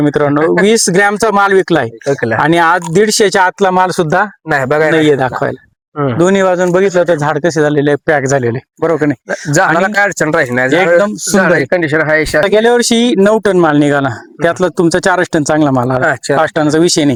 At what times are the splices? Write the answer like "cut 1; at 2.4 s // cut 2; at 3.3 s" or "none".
none